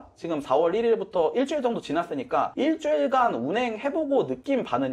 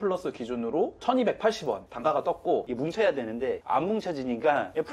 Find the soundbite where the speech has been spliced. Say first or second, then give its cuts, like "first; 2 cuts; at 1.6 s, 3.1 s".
second; 1 cut; at 2.7 s